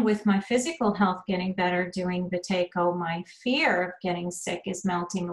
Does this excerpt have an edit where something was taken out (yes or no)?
no